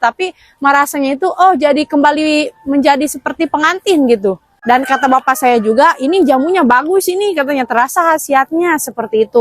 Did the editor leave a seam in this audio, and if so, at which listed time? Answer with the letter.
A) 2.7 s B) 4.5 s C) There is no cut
B